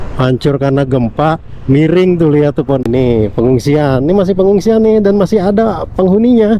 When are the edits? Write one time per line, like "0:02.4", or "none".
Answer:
0:02.9